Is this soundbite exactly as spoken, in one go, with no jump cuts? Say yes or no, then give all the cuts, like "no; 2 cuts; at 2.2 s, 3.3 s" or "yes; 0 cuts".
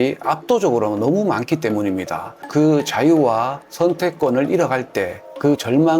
no; 1 cut; at 2.5 s